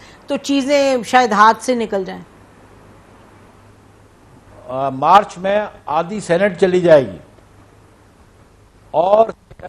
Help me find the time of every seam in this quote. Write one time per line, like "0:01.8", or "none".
0:03.5